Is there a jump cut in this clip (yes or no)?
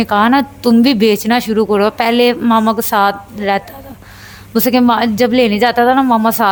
no